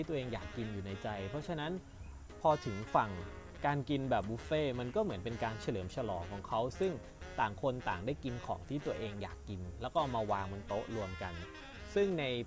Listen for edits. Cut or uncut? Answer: uncut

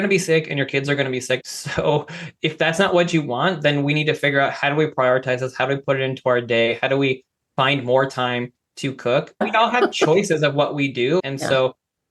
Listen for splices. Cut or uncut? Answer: cut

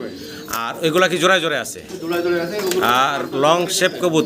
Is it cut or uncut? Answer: uncut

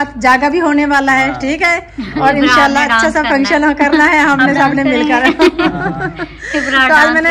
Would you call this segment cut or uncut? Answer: uncut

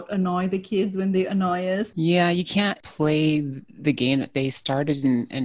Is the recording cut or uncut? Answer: cut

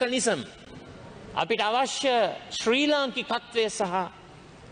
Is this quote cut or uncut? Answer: uncut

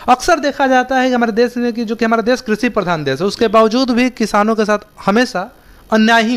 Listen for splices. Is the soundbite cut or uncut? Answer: uncut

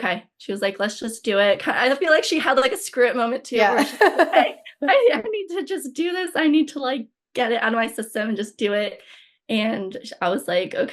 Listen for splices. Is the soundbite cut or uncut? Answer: uncut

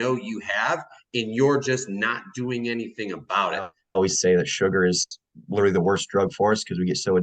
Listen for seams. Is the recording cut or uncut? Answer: cut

